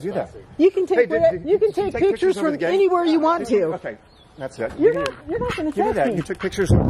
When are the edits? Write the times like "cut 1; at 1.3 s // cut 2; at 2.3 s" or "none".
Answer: none